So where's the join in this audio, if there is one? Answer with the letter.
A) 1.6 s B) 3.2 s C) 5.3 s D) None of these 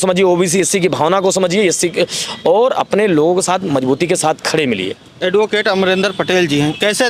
D